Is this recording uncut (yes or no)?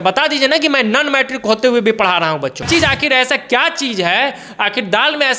no